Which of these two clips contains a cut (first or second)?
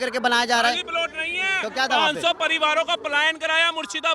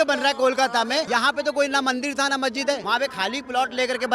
second